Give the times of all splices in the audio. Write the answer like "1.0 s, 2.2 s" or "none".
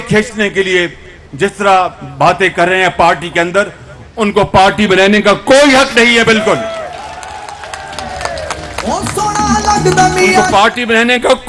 none